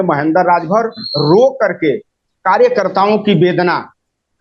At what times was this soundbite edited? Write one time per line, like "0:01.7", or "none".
none